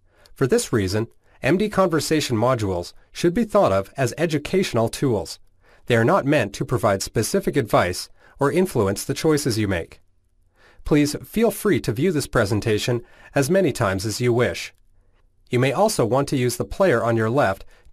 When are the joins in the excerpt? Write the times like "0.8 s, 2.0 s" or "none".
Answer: none